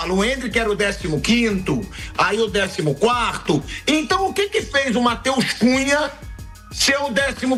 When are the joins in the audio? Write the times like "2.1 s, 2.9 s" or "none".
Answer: none